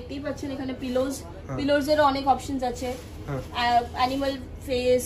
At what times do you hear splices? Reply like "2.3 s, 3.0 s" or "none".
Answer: none